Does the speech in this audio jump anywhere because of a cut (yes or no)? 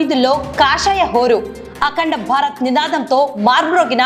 no